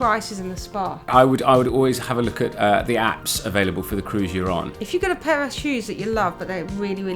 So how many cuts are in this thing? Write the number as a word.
two